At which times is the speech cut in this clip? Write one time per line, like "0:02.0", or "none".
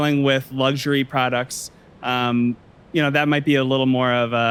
none